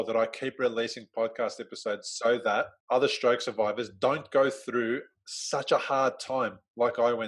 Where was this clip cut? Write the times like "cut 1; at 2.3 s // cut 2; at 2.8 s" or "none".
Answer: cut 1; at 2.8 s